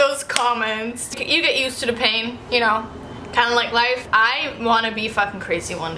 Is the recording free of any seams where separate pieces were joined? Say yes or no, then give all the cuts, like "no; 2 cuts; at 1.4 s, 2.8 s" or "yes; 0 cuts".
no; 3 cuts; at 1.1 s, 2.4 s, 4.0 s